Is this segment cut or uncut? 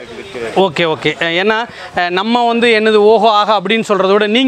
uncut